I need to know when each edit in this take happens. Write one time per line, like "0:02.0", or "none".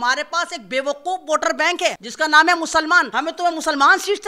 0:02.1
0:03.1